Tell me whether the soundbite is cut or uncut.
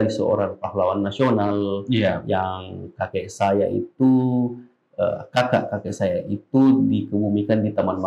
uncut